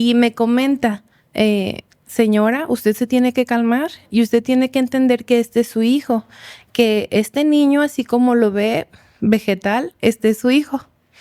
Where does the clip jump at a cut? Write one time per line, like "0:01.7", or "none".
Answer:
none